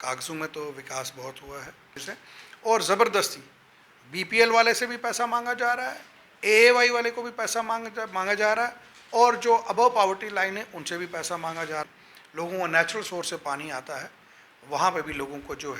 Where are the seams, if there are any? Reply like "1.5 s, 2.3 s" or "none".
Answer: 2.0 s, 11.8 s